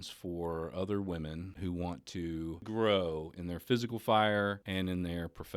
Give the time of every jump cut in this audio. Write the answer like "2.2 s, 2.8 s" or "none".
1.5 s, 2.6 s, 4.6 s